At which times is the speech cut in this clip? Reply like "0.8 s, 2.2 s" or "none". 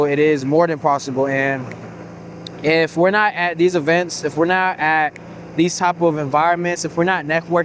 none